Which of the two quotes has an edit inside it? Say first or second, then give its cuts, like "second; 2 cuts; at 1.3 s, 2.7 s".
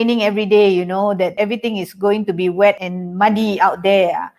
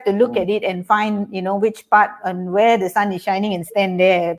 first; 2 cuts; at 1.3 s, 2.8 s